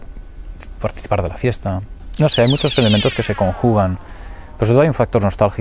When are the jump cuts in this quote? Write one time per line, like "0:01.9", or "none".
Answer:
0:01.3